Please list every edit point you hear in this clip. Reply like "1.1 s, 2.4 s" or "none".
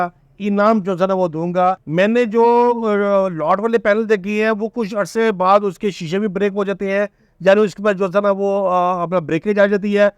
1.8 s